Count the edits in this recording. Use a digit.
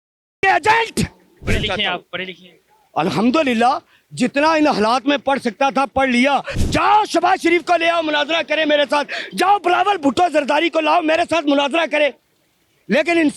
1